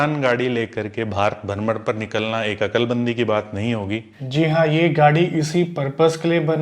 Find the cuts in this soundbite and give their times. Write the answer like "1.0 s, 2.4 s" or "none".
4.1 s